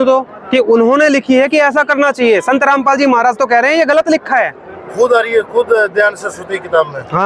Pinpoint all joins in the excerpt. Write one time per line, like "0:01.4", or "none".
none